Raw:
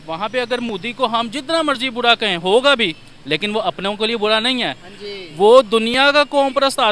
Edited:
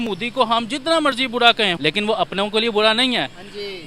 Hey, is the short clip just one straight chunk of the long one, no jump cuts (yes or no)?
no